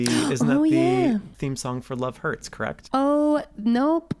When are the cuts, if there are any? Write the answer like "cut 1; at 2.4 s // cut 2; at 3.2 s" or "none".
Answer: cut 1; at 1.3 s // cut 2; at 2.8 s